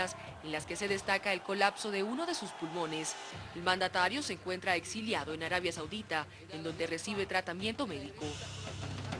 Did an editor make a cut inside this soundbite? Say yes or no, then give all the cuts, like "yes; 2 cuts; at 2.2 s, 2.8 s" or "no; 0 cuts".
yes; 1 cut; at 4.1 s